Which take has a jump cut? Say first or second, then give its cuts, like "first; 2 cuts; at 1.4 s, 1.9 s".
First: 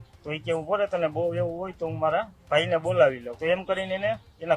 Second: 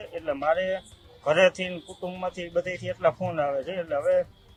first; 1 cut; at 3.3 s